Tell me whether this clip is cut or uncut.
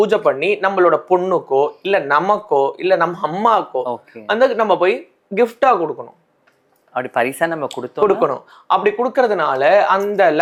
uncut